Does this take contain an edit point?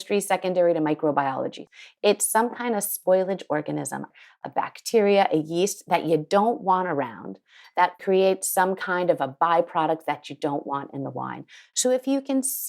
yes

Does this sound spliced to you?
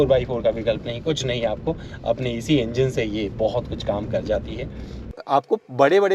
yes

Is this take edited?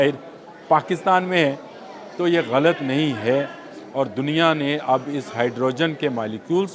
no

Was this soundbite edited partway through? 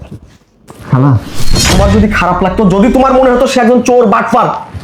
yes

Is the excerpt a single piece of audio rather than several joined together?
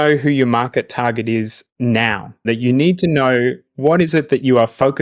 no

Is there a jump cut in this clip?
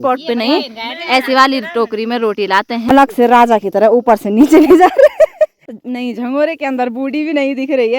yes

